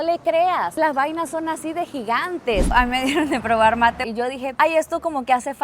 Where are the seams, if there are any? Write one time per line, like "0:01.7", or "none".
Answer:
0:02.7
0:04.0